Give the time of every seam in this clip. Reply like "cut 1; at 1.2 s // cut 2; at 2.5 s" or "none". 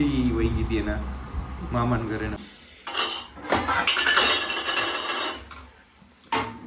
cut 1; at 2.4 s